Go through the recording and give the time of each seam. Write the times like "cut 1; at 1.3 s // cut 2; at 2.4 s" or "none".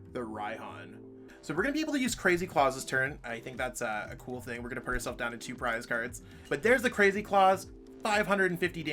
cut 1; at 1.2 s // cut 2; at 6.4 s